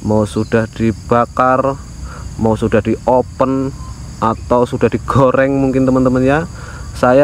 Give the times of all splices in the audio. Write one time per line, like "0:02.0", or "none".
none